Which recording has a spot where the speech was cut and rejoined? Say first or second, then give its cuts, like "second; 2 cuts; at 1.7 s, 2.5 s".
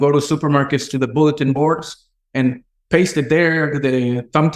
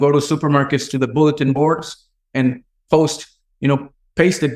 first; 1 cut; at 2.7 s